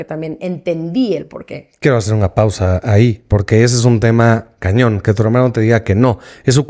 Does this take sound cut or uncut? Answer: uncut